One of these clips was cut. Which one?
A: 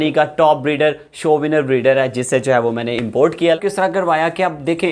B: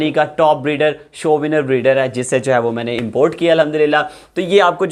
A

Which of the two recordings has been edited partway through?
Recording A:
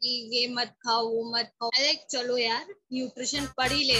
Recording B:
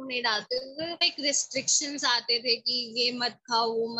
B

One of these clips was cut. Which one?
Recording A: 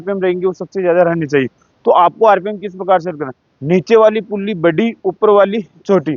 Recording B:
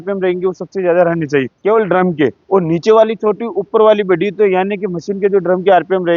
B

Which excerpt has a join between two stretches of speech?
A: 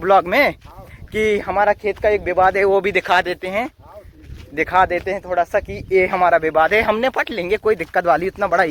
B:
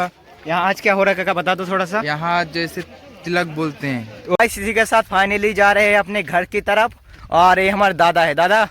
B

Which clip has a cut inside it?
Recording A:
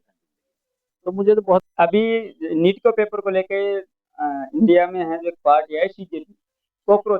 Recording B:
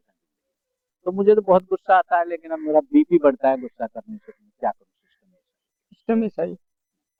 A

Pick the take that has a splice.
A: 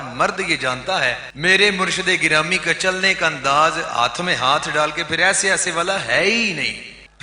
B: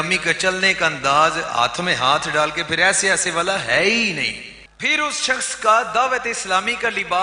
A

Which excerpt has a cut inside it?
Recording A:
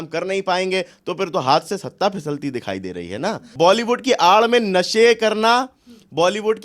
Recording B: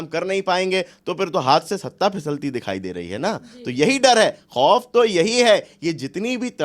A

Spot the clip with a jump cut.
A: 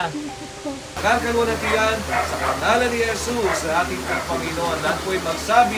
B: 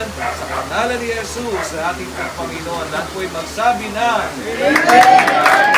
A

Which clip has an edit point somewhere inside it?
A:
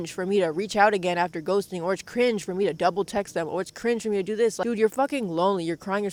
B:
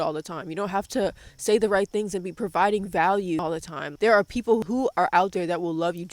B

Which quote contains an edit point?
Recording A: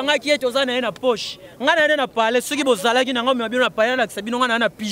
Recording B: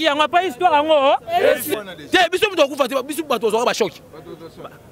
B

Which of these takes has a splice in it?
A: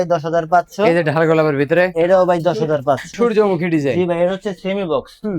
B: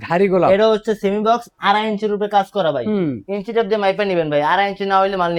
A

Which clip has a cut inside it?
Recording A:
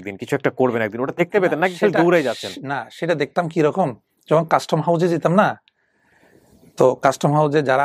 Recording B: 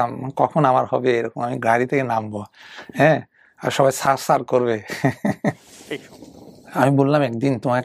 B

